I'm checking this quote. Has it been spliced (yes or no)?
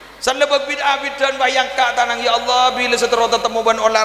no